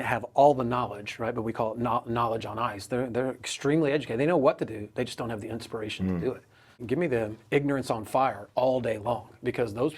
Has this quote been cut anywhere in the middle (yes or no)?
yes